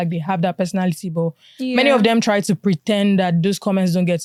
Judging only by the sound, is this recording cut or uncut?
uncut